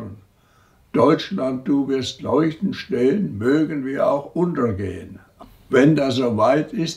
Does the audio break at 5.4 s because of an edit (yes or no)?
yes